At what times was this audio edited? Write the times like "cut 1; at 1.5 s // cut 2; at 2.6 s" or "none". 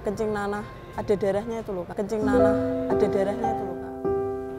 none